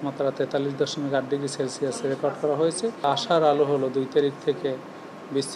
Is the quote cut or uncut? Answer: uncut